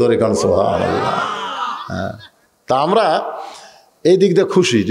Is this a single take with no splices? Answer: yes; 0 cuts

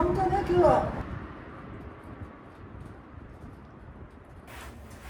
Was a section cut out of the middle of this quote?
no; 0 cuts

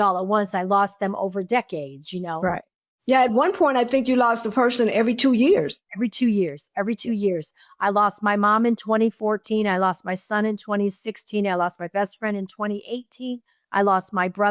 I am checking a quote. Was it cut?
no; 0 cuts

